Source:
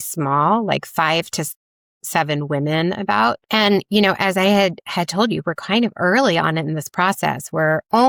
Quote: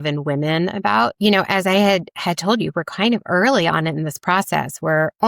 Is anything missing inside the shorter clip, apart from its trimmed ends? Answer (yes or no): yes